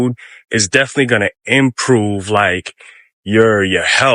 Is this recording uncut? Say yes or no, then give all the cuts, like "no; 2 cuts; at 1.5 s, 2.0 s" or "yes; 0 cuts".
yes; 0 cuts